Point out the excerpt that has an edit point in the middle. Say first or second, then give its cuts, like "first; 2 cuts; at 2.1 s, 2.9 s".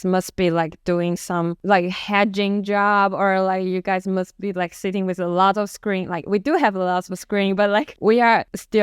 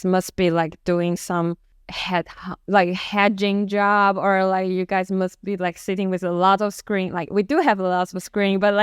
first; 2 cuts; at 1.6 s, 8.1 s